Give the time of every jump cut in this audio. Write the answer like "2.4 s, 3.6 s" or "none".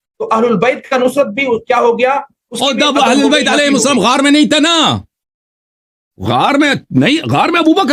none